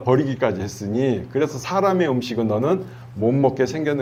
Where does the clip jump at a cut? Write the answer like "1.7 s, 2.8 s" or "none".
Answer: none